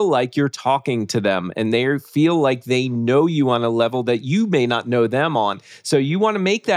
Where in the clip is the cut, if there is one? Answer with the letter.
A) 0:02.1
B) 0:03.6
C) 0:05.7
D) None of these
D